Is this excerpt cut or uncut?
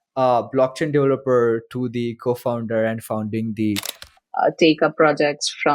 cut